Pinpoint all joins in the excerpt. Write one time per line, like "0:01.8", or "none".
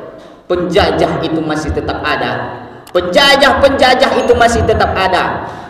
none